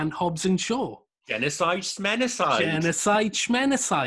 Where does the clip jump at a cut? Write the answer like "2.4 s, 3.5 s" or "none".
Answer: none